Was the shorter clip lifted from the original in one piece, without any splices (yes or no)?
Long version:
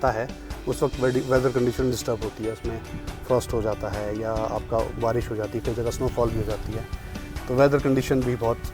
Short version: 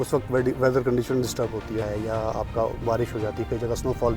no